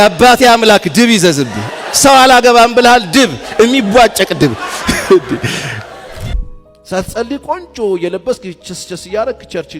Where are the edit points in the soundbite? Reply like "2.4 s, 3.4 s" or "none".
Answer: 6.3 s